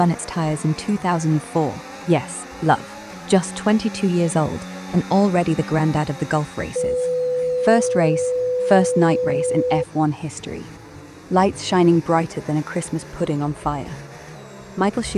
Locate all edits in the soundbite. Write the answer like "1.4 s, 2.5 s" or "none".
none